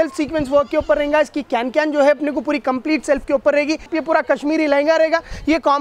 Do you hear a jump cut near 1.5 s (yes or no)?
no